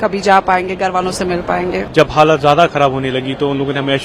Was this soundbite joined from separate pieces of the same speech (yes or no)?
yes